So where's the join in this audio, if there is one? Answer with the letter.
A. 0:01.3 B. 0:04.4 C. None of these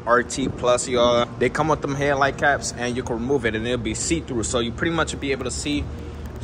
A